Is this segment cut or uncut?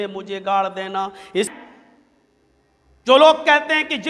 cut